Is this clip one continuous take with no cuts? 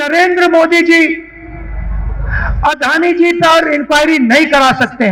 yes; 0 cuts

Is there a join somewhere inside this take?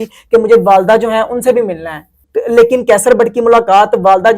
yes; 1 cut; at 2.3 s

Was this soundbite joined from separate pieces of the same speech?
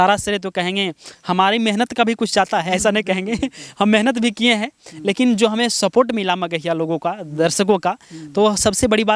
no; 0 cuts

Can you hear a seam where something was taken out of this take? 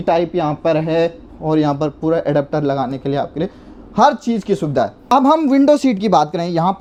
no; 0 cuts

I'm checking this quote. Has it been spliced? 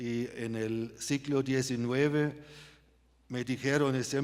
no; 0 cuts

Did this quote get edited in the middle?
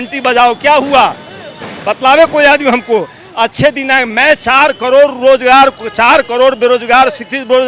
no; 0 cuts

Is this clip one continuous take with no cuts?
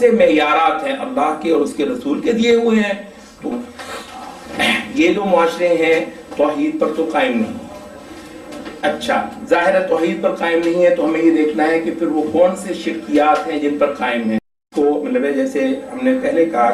no; 2 cuts; at 3.5 s, 14.6 s

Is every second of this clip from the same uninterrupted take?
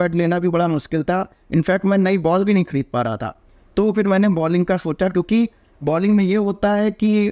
yes; 0 cuts

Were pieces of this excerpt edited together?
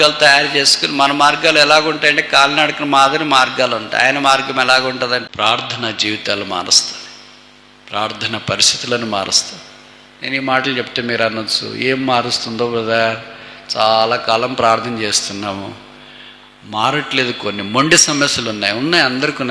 yes; 1 cut; at 5.2 s

